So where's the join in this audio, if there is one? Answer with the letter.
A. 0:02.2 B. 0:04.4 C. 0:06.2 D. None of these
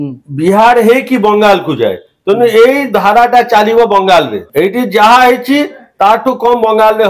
B